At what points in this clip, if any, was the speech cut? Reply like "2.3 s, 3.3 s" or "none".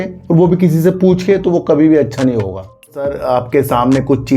3.2 s